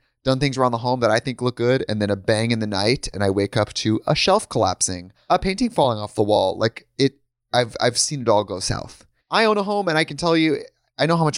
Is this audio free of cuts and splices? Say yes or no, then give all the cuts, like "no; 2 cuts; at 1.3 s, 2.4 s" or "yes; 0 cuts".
yes; 0 cuts